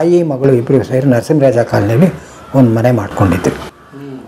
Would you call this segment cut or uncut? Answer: uncut